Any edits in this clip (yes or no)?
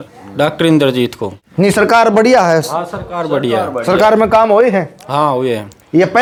no